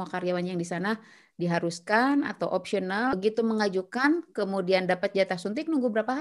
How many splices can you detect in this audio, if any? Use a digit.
1